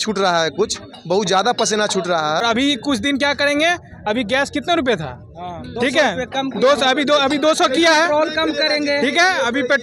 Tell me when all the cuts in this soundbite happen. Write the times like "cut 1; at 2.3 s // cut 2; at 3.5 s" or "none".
cut 1; at 2.4 s

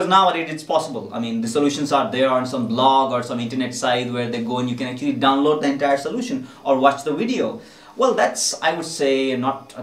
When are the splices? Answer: none

